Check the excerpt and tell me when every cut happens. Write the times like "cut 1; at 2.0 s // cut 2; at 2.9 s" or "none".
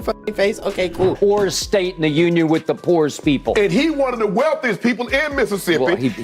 cut 1; at 1.2 s